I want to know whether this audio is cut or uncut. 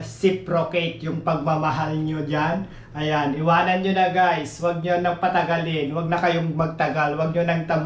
uncut